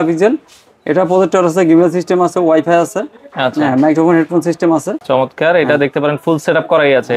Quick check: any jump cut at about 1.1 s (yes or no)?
no